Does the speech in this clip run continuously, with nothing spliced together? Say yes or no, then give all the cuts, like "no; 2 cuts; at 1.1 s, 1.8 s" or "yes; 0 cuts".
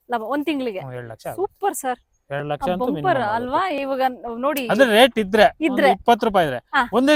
yes; 0 cuts